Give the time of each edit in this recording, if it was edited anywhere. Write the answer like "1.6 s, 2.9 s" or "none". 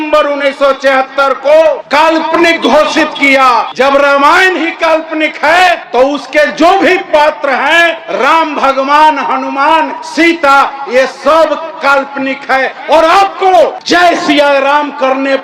2.0 s, 3.7 s, 5.8 s, 7.6 s, 10.0 s, 13.6 s